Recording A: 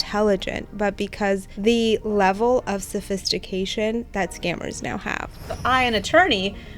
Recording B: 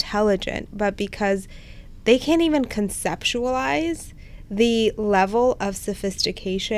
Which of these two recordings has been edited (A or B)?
A